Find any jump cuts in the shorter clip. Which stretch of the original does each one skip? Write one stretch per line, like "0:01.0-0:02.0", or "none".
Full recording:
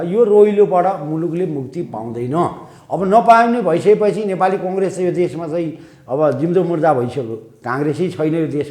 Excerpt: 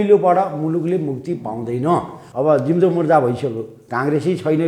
0:02.7-0:05.9